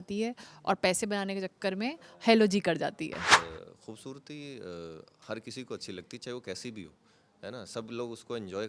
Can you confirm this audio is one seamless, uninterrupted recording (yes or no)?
no